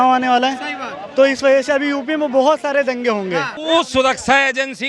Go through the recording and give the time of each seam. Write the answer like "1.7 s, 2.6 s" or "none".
3.5 s